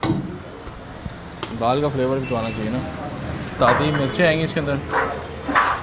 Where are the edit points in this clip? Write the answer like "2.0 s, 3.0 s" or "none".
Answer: 3.5 s